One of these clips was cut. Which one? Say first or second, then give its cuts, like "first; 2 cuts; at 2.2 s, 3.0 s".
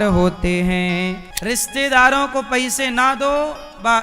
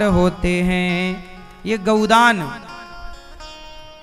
first; 1 cut; at 1.3 s